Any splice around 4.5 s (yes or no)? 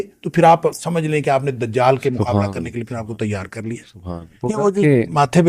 yes